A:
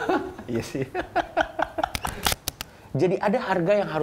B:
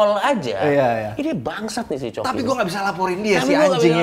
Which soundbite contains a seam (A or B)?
A